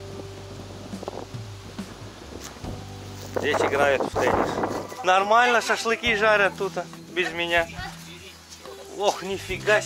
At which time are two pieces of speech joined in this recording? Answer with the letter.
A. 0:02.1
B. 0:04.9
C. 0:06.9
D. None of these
B